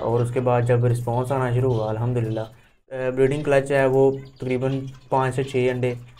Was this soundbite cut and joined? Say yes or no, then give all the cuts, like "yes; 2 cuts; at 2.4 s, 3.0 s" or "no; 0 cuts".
yes; 1 cut; at 3.0 s